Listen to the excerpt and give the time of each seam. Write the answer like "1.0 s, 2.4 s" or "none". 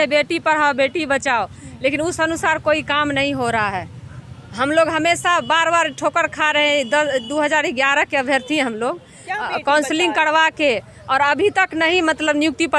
none